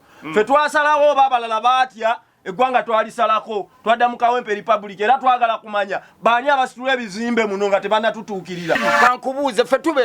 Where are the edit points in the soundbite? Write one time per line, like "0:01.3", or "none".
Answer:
0:08.9